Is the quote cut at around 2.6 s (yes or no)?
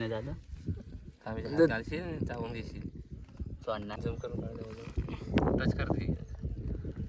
no